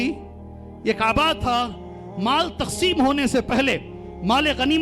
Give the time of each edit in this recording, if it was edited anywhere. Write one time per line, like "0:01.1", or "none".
none